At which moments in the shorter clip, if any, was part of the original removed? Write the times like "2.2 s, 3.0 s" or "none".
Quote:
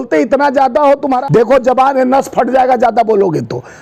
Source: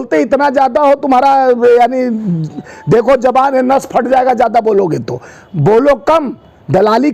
1.1 s